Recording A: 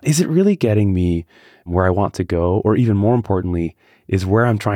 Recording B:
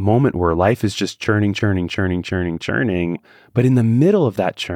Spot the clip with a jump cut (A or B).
B